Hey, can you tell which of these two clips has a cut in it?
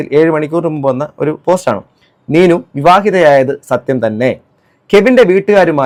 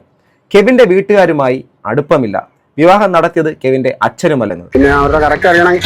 second; 1 cut; at 4.6 s

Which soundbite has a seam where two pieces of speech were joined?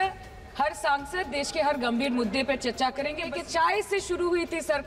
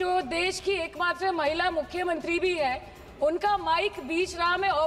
first; 1 cut; at 3.3 s

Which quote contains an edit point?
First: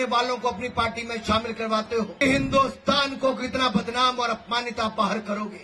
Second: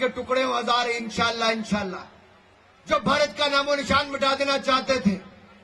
first; 1 cut; at 2.1 s

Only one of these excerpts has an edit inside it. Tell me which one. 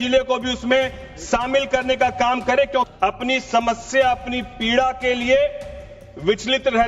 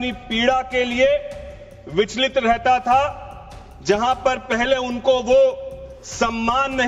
first; 1 cut; at 2.9 s

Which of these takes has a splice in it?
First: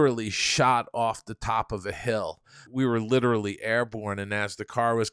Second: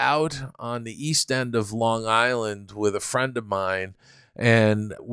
first; 1 cut; at 2.7 s

